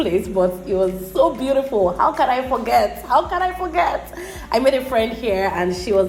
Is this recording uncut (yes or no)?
yes